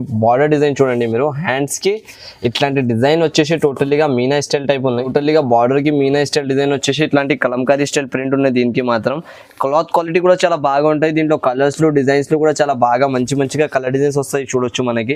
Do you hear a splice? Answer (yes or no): no